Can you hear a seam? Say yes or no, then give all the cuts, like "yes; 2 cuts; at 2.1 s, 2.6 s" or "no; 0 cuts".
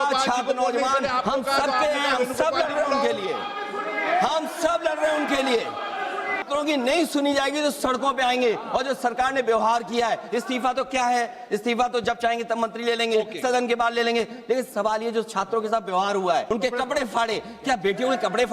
yes; 2 cuts; at 6.4 s, 16.4 s